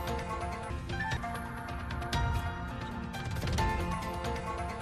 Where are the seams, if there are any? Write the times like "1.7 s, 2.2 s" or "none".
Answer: none